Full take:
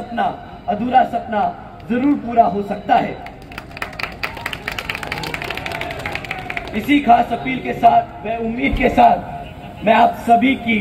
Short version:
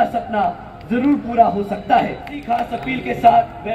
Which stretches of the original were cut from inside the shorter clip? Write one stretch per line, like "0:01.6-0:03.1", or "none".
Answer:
0:03.5-0:07.1